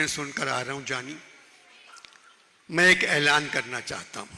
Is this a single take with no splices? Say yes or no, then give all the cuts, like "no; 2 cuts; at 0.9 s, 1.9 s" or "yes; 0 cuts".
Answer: yes; 0 cuts